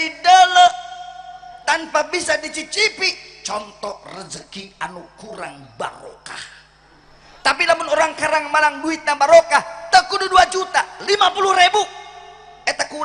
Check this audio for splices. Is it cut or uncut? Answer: uncut